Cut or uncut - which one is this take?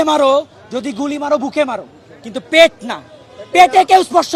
uncut